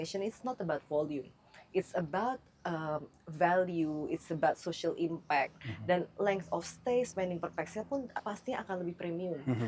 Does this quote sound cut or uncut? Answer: uncut